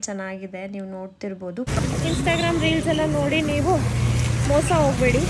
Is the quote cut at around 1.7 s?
yes; 1 cut; at 1.7 s

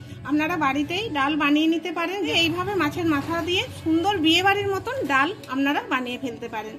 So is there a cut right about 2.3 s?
yes; 1 cut; at 2.3 s

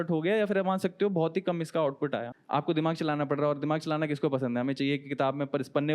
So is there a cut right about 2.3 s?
yes; 1 cut; at 2.3 s

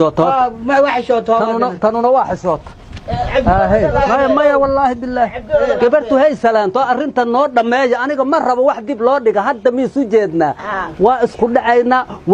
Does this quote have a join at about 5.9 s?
no; 0 cuts

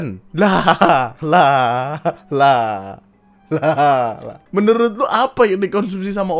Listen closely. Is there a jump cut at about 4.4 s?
yes; 1 cut; at 4.4 s

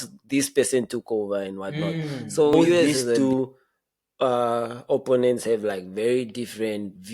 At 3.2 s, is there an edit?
yes; 1 cut; at 3.2 s

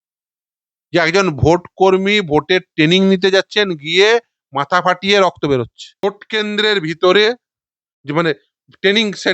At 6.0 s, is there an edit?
yes; 1 cut; at 6.0 s

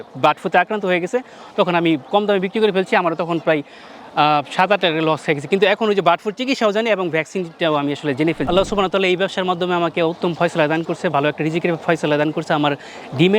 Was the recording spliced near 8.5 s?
yes; 1 cut; at 8.5 s

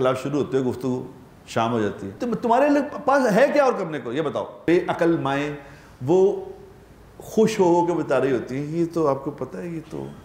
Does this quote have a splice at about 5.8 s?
no; 2 cuts; at 2.1 s, 4.5 s

